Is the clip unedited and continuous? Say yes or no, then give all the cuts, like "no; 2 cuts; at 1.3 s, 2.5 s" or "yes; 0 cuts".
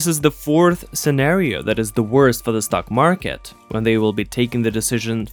yes; 0 cuts